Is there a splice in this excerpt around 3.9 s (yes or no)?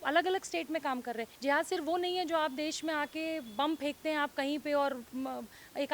no